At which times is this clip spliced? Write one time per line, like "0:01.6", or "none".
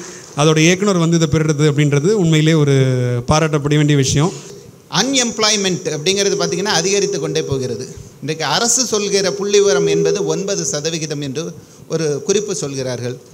0:04.5